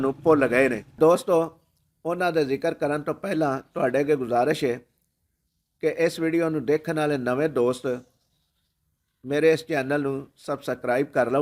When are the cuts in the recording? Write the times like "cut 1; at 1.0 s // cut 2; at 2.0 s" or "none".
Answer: cut 1; at 0.9 s